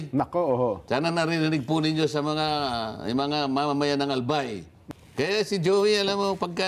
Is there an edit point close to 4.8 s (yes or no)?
yes